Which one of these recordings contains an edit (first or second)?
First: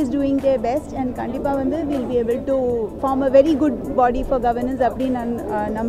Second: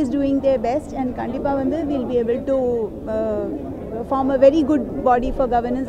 first